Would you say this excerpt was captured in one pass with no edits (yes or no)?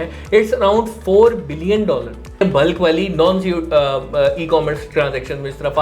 no